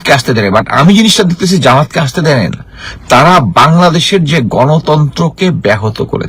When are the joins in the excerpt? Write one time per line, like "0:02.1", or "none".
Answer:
none